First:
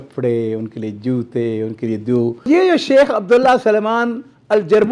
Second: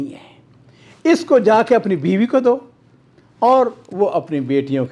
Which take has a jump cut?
first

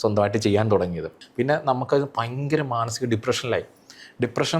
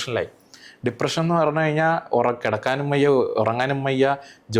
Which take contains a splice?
first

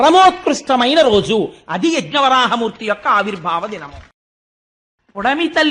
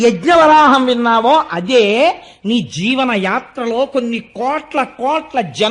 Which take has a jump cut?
first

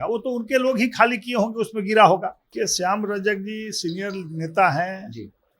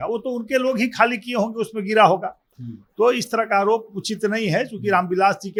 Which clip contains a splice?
first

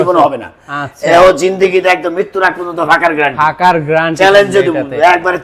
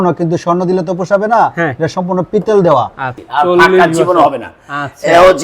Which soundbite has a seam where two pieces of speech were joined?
second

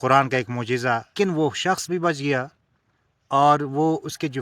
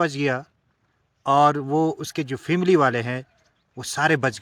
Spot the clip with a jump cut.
first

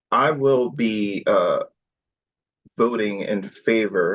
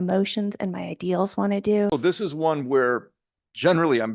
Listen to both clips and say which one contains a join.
second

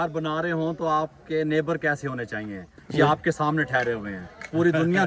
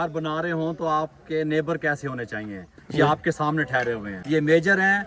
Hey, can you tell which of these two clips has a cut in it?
second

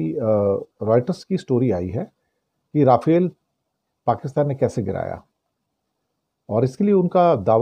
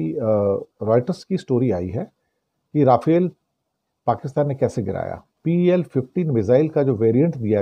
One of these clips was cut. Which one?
second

